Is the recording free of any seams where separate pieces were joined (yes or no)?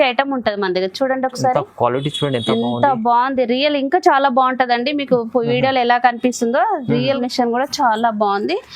no